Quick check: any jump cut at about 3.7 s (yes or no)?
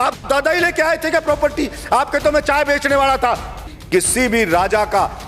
yes